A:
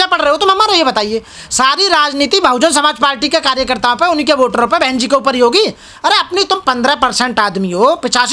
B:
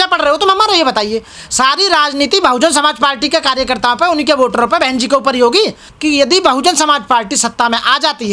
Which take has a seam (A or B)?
B